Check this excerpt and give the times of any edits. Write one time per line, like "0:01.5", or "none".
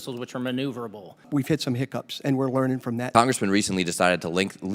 0:01.2
0:03.1